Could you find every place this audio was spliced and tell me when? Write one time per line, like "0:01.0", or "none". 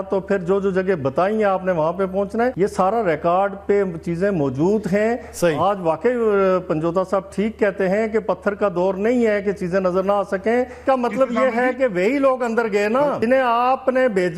0:02.5
0:10.8
0:13.2